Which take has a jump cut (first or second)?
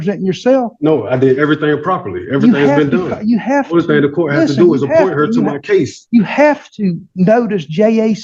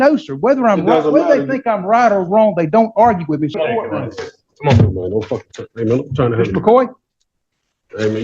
second